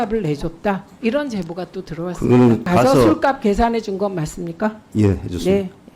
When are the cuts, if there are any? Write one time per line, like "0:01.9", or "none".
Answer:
0:02.7